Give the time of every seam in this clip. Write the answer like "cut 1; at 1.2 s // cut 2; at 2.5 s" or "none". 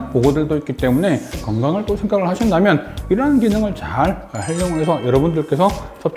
cut 1; at 1.4 s

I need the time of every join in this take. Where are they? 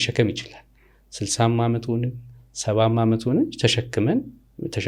none

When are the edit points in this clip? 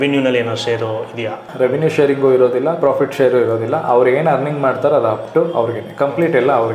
cut 1; at 1.4 s

